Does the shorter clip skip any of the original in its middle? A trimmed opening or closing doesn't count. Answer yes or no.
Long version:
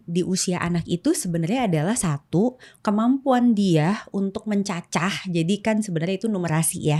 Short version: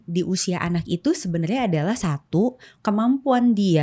no